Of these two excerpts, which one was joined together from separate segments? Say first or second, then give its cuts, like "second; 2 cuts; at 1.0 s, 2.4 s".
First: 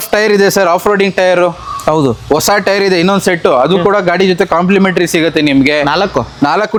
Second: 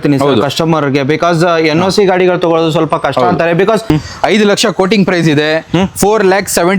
second; 1 cut; at 3.8 s